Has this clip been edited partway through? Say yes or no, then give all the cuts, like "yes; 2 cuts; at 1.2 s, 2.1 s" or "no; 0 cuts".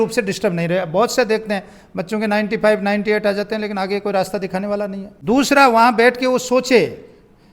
yes; 1 cut; at 5.1 s